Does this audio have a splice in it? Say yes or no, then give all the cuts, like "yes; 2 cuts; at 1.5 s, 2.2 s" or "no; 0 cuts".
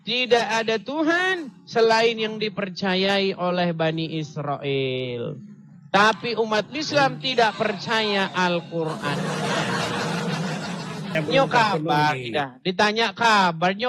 yes; 1 cut; at 11.1 s